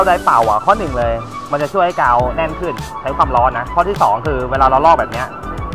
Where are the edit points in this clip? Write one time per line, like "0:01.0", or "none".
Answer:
none